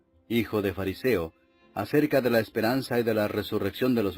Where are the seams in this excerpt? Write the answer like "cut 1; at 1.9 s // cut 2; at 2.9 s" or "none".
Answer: none